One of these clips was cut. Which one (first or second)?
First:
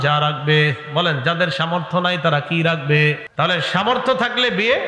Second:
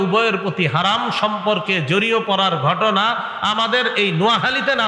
first